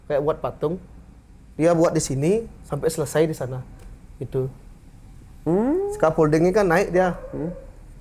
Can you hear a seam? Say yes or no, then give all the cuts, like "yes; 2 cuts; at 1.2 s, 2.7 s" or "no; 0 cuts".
no; 0 cuts